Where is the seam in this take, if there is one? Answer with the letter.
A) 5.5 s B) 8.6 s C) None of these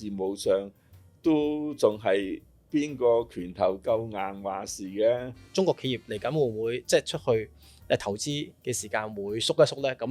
A